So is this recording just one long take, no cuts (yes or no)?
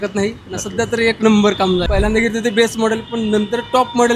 no